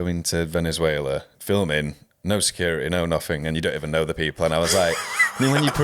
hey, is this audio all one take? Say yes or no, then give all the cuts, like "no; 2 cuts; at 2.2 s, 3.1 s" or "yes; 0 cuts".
no; 1 cut; at 1.3 s